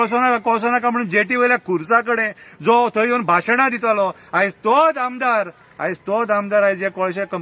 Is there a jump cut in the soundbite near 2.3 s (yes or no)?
no